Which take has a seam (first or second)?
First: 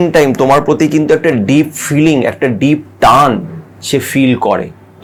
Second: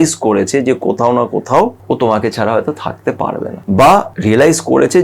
second